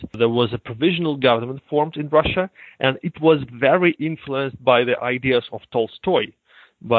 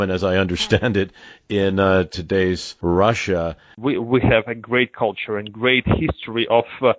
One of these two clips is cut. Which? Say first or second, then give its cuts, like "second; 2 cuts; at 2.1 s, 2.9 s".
second; 2 cuts; at 2.7 s, 3.8 s